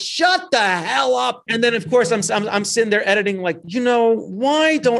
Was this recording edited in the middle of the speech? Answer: yes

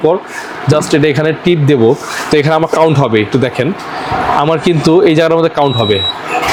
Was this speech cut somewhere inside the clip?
no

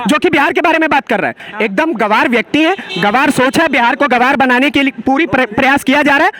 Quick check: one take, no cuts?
no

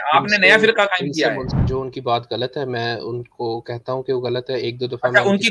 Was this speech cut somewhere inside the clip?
yes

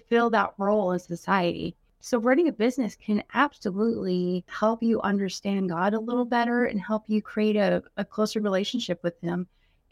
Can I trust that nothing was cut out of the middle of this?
no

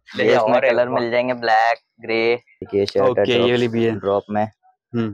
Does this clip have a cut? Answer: yes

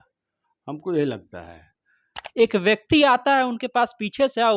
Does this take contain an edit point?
yes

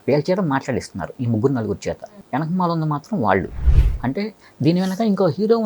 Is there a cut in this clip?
yes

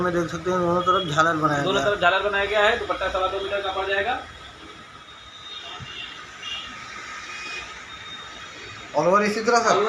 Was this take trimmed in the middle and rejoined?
yes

